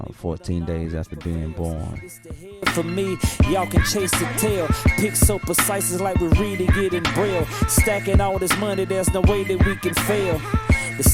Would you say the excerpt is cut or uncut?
cut